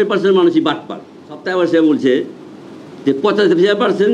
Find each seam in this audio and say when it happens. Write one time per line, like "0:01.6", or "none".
0:01.4